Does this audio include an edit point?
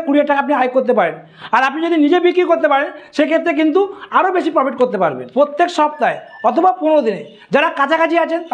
yes; 1 cut; at 5.2 s

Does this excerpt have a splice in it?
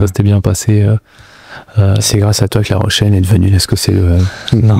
no; 0 cuts

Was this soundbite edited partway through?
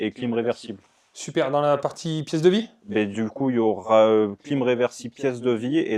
no; 0 cuts

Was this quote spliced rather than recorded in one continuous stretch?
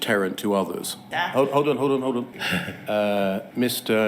yes; 2 cuts; at 1.1 s, 2.4 s

